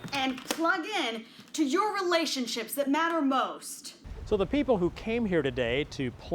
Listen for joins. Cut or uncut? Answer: cut